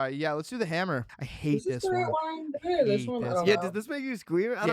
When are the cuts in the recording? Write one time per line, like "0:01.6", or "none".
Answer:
0:01.1